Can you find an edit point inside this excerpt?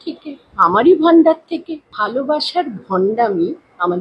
yes; 1 cut; at 1.8 s

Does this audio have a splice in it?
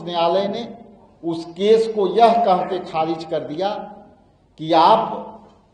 no; 0 cuts

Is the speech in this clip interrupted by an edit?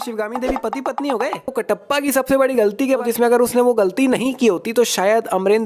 yes; 2 cuts; at 1.6 s, 3.0 s

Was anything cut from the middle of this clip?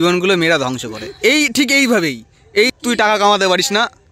yes; 1 cut; at 2.7 s

